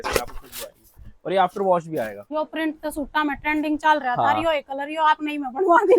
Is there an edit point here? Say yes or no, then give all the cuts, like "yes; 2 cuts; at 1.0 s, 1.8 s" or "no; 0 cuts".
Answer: yes; 1 cut; at 2.2 s